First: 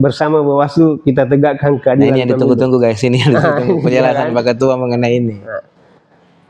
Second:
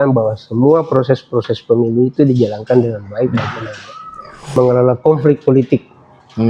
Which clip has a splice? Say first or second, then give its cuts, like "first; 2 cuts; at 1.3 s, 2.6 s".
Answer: second; 1 cut; at 4.5 s